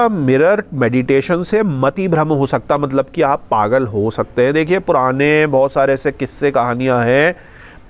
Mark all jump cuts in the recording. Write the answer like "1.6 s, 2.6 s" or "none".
none